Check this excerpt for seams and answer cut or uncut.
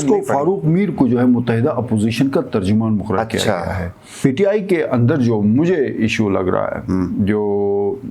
cut